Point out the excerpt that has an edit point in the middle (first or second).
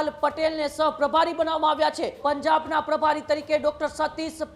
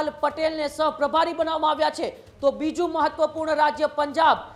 first